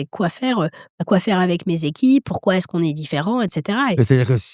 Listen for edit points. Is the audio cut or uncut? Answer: uncut